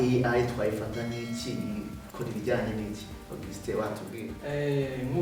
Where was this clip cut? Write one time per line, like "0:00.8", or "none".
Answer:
none